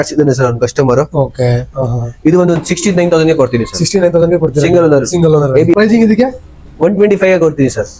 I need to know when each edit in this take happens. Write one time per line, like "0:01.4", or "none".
0:05.7